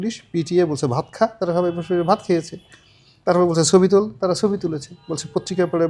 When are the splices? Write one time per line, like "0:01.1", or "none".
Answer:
none